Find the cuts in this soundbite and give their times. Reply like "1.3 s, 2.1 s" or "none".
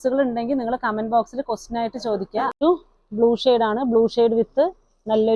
2.6 s

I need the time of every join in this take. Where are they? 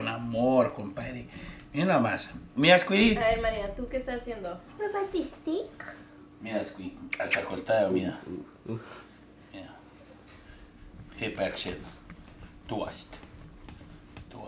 4.8 s

